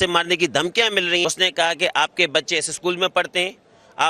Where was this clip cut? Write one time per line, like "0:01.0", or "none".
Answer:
0:01.2